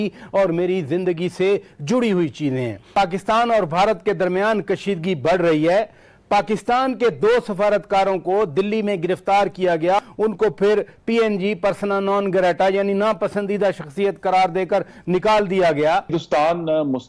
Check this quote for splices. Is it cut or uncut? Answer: cut